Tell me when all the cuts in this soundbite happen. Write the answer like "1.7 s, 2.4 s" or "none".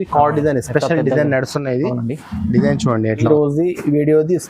3.2 s